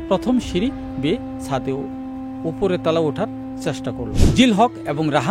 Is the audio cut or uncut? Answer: cut